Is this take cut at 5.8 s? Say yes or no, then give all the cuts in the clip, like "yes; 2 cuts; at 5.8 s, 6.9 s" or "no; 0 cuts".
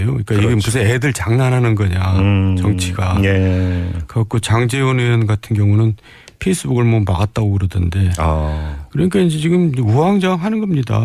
yes; 1 cut; at 5.8 s